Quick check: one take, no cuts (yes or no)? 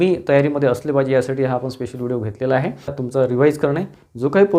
no